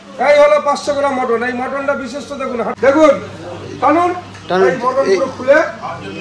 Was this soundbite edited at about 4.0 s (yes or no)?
no